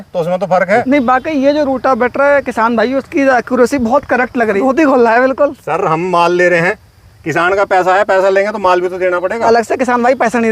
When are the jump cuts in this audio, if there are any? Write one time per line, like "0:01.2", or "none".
0:00.8
0:04.6
0:09.4